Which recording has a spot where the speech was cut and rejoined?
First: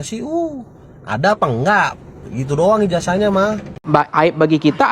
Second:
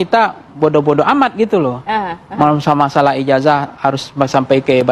first; 1 cut; at 3.7 s

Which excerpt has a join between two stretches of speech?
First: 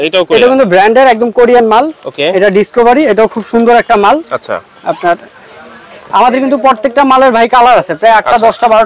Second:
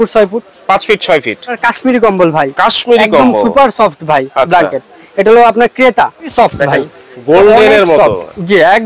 second; 2 cuts; at 1.6 s, 6.3 s

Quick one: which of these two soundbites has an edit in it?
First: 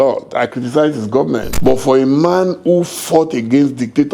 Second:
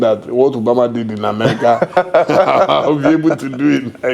first; 1 cut; at 1.5 s

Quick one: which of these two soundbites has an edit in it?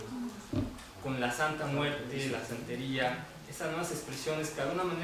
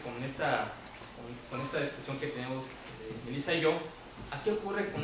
second; 1 cut; at 1.8 s

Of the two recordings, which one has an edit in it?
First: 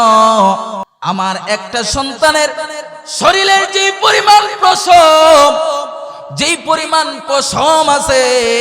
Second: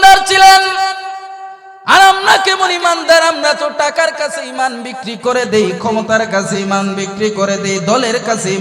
first; 1 cut; at 0.9 s

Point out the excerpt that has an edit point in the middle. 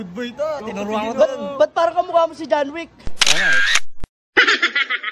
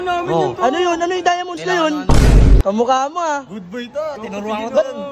second; 1 cut; at 2.6 s

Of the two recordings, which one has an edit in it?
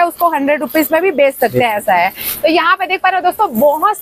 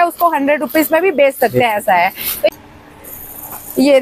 second; 1 cut; at 2.5 s

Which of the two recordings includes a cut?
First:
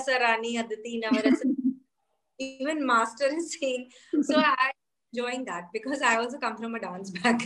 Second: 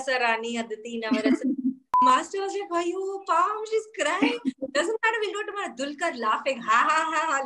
second; 1 cut; at 1.9 s

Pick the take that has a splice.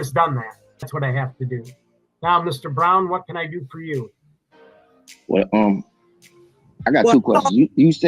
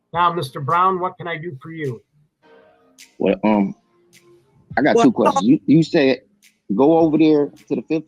first; 1 cut; at 0.9 s

